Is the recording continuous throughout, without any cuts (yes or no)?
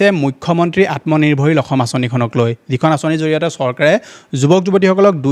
yes